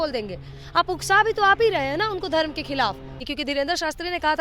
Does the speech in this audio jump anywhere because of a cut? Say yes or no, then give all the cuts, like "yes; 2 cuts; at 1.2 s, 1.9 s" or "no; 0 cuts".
yes; 1 cut; at 3.3 s